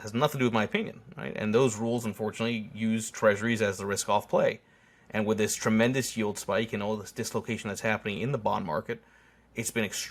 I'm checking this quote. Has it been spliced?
no; 0 cuts

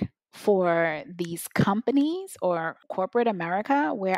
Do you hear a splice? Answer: yes; 1 cut; at 2.8 s

